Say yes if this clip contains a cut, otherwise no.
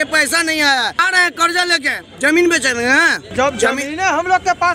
yes